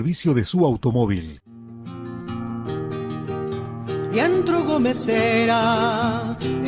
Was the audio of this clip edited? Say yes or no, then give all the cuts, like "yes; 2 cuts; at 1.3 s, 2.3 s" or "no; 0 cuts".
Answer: yes; 1 cut; at 1.8 s